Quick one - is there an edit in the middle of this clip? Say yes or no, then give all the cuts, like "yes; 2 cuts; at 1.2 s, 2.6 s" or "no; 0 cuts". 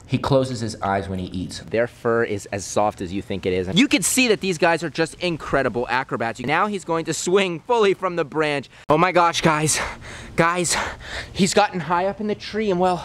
yes; 4 cuts; at 1.7 s, 3.9 s, 6.5 s, 8.7 s